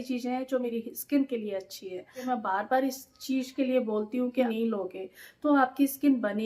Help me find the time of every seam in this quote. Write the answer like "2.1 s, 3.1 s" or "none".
0.7 s, 2.3 s, 4.5 s